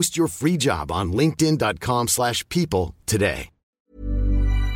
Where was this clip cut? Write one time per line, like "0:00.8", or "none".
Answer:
0:03.8

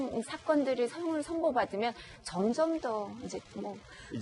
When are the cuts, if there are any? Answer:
none

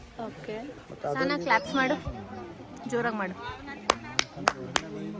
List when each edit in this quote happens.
0:01.3

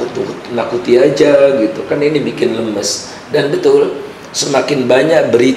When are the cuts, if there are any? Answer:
none

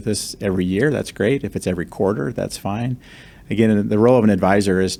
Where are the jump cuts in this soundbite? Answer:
none

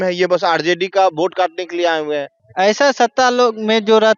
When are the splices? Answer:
none

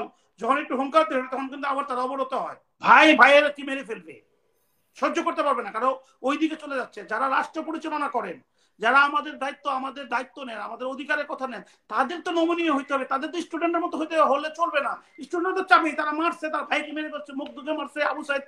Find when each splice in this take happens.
0:02.6

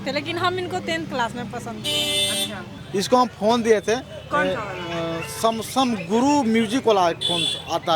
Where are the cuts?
0:02.8

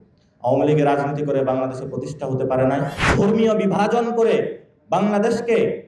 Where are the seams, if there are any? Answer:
0:03.0

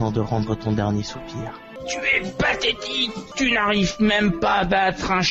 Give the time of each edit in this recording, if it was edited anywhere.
0:01.8
0:03.2

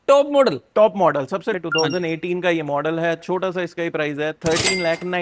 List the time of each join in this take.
0:01.5

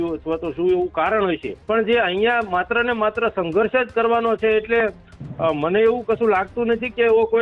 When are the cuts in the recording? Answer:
0:01.5

